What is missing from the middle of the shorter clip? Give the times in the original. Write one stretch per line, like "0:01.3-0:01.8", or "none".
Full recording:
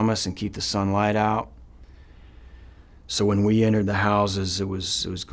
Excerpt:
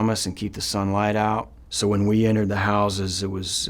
0:01.6-0:03.0